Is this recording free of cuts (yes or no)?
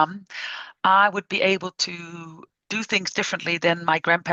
yes